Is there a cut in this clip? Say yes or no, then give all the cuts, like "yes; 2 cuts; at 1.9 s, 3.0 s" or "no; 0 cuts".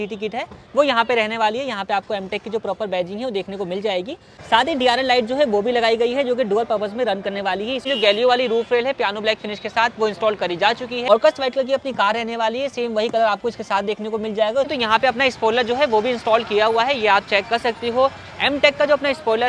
yes; 4 cuts; at 4.3 s, 7.8 s, 11.1 s, 14.7 s